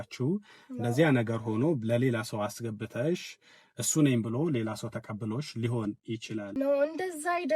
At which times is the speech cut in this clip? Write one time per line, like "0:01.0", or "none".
0:06.5